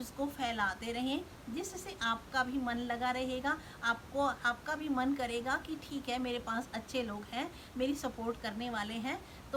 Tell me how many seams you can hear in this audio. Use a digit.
0